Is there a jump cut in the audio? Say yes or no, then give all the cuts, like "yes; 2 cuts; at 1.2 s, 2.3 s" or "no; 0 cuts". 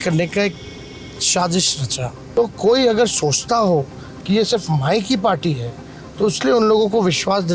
yes; 1 cut; at 2.2 s